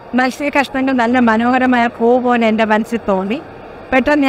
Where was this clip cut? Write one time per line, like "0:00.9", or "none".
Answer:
none

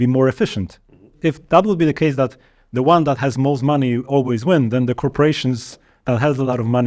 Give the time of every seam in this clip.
0:01.1

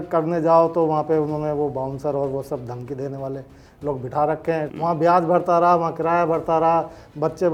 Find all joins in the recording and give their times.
0:04.7

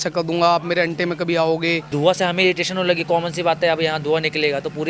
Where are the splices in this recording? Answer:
0:01.9

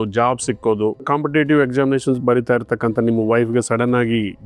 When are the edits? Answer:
0:01.0
0:02.2

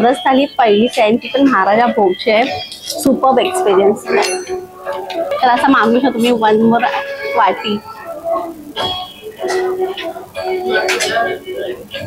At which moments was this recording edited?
0:05.3

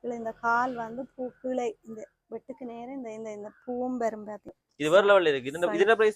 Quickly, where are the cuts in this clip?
0:04.6

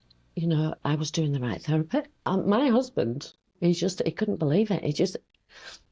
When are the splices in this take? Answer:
0:02.2
0:03.5

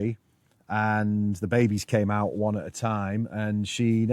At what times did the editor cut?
none

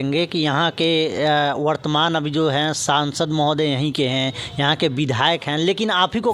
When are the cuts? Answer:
none

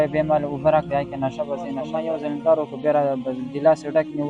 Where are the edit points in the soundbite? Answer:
0:01.9

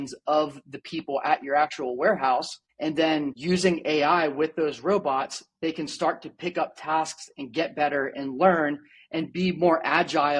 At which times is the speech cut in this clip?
none

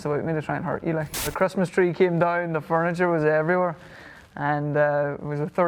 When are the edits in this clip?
0:01.3

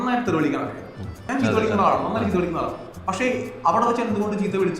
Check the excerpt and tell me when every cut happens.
0:01.2

